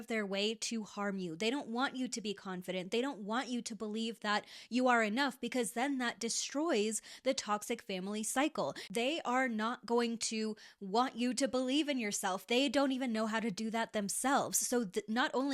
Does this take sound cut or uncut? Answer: cut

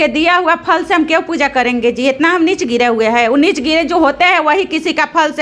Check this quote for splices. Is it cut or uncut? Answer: uncut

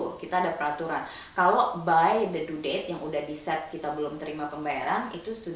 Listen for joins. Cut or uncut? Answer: uncut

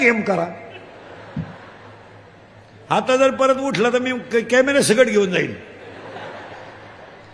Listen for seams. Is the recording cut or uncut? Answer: uncut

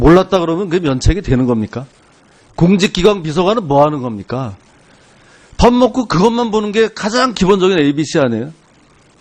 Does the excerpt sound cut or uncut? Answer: uncut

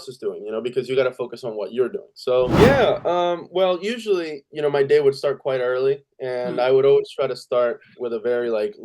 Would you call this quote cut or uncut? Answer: cut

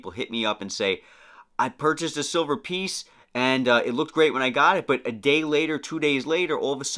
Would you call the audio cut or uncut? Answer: uncut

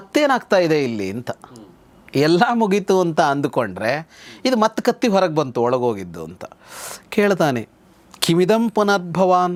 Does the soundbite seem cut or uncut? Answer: uncut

